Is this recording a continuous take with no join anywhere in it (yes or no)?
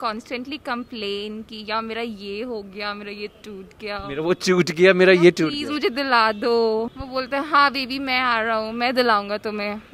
yes